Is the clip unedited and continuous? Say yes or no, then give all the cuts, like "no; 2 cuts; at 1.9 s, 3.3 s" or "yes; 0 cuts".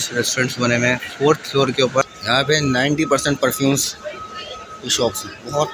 no; 1 cut; at 2.1 s